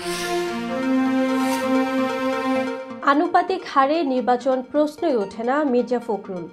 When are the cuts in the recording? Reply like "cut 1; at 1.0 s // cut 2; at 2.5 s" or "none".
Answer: cut 1; at 2.9 s